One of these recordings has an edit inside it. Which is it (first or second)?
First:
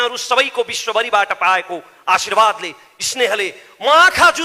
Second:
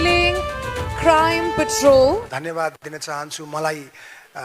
second